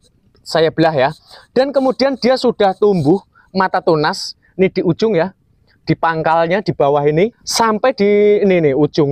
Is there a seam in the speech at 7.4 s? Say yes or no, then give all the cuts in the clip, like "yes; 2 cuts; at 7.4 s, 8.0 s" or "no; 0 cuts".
yes; 1 cut; at 7.4 s